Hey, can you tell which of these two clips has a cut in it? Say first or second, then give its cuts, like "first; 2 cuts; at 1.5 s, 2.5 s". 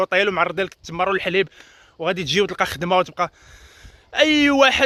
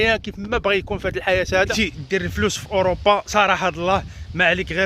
second; 1 cut; at 1.7 s